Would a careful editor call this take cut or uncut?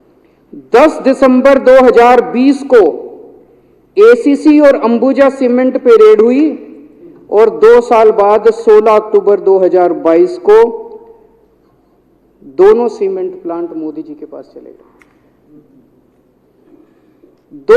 uncut